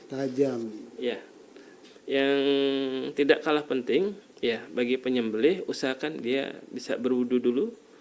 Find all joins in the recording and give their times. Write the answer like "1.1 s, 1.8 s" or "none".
1.8 s